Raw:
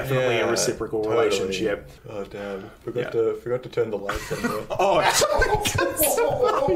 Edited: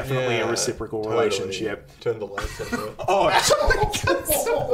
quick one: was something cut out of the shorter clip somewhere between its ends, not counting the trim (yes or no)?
yes